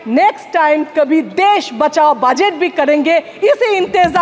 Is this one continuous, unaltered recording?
yes; 0 cuts

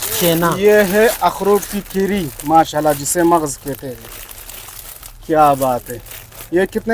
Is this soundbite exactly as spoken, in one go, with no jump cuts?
yes; 0 cuts

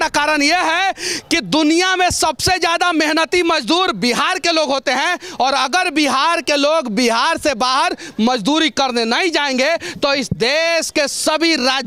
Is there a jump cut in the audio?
no; 0 cuts

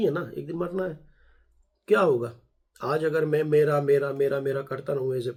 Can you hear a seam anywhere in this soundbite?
no; 0 cuts

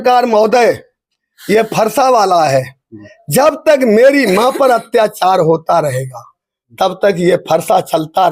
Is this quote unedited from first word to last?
yes; 0 cuts

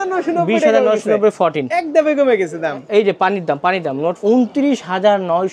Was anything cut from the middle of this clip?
yes; 1 cut; at 4.2 s

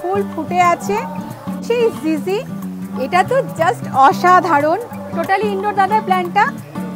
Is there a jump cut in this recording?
yes; 1 cut; at 1.7 s

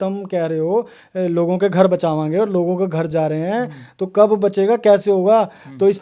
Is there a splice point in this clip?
no; 0 cuts

